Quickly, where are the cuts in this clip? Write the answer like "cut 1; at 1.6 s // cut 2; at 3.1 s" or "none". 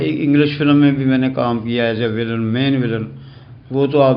none